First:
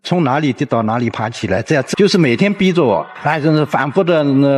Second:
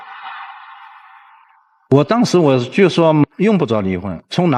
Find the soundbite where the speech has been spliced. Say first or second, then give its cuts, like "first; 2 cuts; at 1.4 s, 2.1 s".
first; 1 cut; at 1.9 s